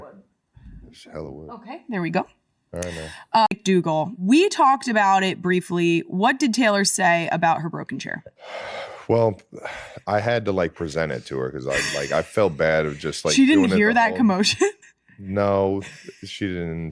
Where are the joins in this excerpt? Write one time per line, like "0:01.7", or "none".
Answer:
0:03.5